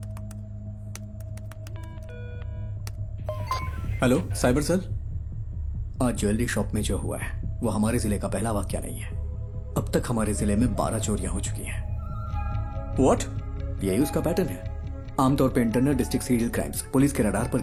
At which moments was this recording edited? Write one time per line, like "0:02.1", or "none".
none